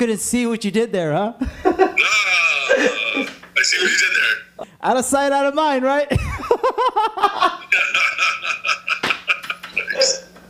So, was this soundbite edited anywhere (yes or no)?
yes